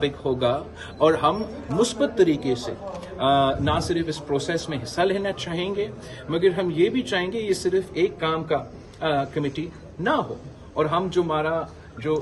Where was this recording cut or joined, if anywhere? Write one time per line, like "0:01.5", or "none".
none